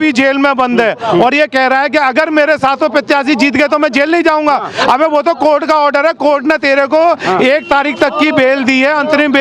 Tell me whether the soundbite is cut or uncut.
uncut